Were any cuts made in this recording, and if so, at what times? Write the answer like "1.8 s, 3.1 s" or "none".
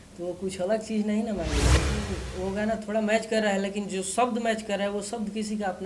2.0 s